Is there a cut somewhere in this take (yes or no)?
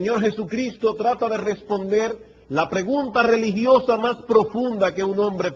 yes